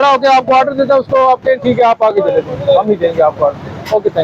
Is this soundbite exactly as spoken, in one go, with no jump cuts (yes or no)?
yes